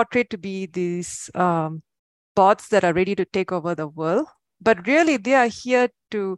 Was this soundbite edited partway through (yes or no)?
no